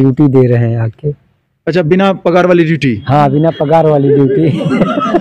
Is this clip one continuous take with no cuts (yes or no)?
yes